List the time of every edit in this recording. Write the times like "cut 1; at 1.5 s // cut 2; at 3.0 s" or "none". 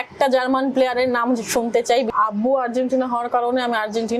cut 1; at 2.1 s